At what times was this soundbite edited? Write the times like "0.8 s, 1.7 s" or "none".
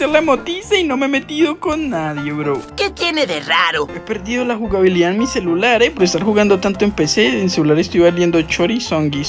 3.9 s